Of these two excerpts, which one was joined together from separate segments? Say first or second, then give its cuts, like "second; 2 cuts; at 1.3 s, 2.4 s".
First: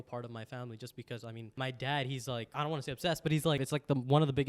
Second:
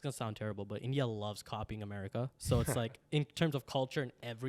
first; 3 cuts; at 1.5 s, 2.5 s, 3.6 s